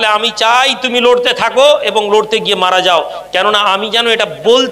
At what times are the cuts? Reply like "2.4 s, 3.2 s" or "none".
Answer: none